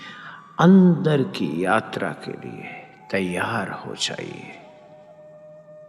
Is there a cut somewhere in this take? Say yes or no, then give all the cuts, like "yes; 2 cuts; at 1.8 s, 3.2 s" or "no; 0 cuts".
no; 0 cuts